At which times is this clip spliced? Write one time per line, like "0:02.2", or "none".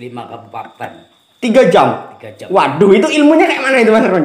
none